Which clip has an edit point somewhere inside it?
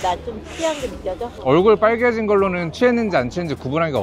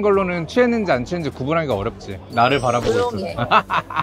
first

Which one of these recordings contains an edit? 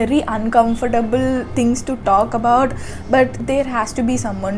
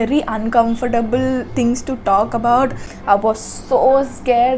second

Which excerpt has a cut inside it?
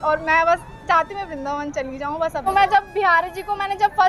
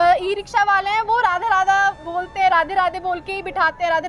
first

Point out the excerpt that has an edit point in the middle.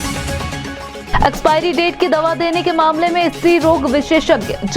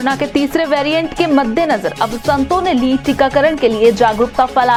first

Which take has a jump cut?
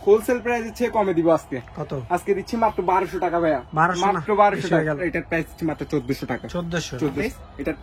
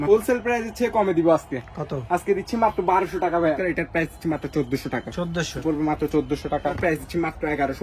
second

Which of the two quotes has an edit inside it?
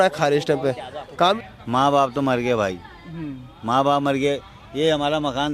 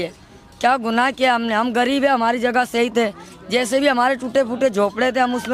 first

